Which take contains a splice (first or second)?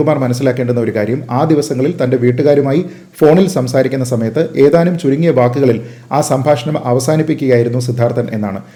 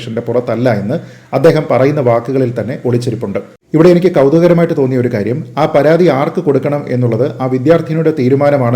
second